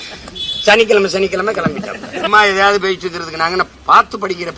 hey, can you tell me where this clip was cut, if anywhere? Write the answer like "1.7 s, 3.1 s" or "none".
2.3 s, 3.8 s